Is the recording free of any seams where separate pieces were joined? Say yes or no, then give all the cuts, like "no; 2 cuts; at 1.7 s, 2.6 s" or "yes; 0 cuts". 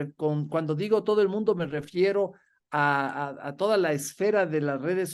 yes; 0 cuts